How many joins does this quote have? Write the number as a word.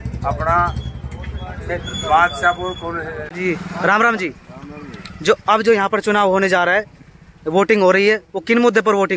one